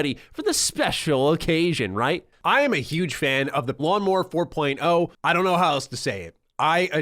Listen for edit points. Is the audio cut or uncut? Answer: cut